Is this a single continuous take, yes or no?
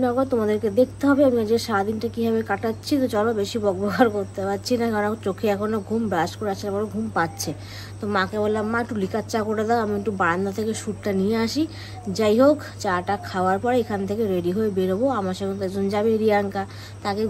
yes